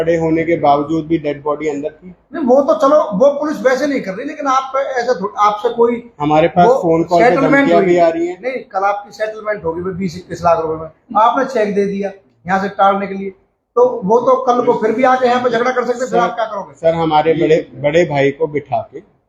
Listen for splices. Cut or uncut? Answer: uncut